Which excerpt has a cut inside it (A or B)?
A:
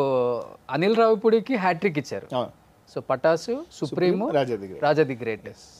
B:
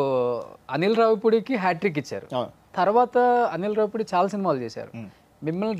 B